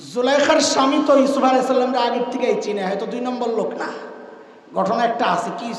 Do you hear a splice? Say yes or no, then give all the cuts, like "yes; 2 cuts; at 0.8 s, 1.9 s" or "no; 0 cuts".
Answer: no; 0 cuts